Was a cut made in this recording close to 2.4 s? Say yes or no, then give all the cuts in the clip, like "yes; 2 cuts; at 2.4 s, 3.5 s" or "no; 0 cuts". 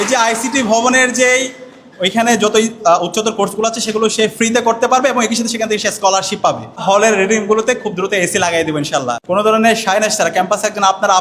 no; 2 cuts; at 6.8 s, 9.2 s